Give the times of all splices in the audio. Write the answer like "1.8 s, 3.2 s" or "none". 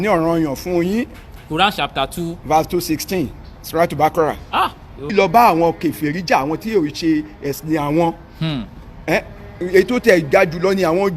5.1 s